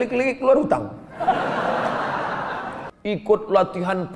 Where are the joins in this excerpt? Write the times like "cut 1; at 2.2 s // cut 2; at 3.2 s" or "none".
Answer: cut 1; at 2.8 s